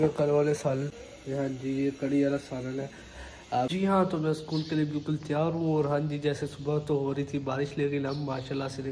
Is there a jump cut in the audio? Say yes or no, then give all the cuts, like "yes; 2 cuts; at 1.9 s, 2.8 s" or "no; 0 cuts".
yes; 2 cuts; at 0.9 s, 3.7 s